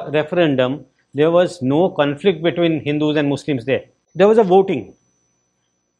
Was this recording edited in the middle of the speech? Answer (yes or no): yes